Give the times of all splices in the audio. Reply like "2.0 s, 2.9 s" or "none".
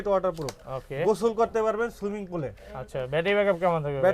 none